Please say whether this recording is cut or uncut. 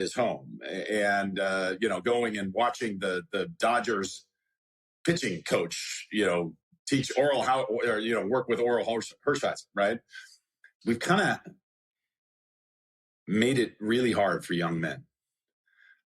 cut